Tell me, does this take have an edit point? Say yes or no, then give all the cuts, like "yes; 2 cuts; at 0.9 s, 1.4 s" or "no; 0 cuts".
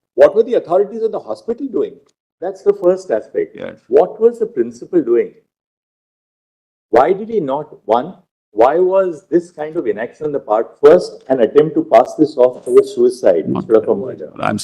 yes; 1 cut; at 2.6 s